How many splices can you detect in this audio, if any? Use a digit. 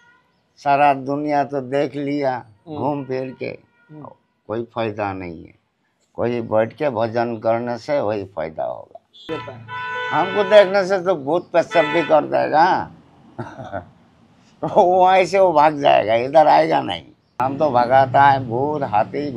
2